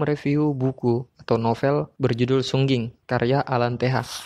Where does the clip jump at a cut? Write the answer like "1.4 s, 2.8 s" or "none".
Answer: 1.1 s, 1.9 s, 3.0 s